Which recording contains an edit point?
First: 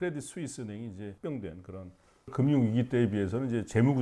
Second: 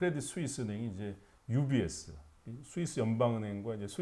first; 2 cuts; at 1.1 s, 2.3 s

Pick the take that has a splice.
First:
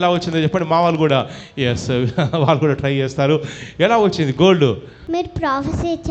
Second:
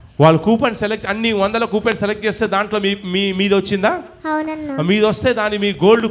first; 1 cut; at 5.0 s

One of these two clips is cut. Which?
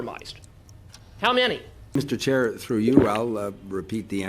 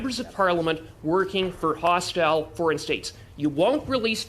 first; 1 cut; at 1.9 s

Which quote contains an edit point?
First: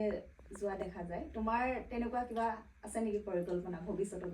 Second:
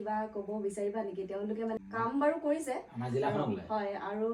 second; 1 cut; at 1.8 s

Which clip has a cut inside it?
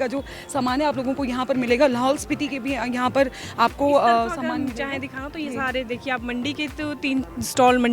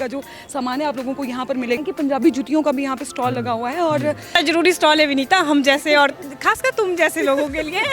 second; 2 cuts; at 1.8 s, 4.3 s

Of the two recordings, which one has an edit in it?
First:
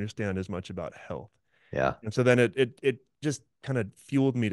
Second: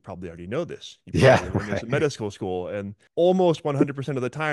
second; 1 cut; at 3.0 s

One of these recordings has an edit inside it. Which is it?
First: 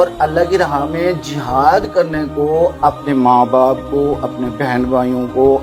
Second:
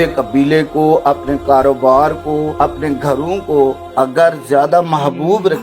second; 2 cuts; at 2.5 s, 3.8 s

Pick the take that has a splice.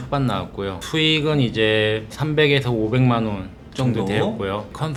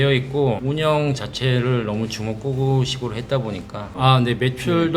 second; 1 cut; at 3.8 s

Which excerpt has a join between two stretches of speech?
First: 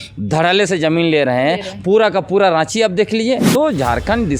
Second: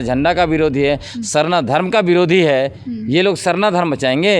first; 1 cut; at 3.4 s

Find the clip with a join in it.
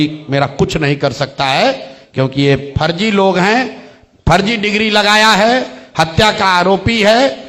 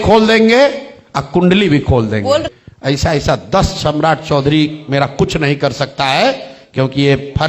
second; 1 cut; at 2.5 s

